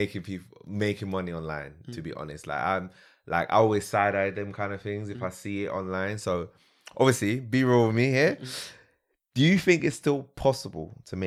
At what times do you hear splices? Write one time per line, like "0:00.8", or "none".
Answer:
none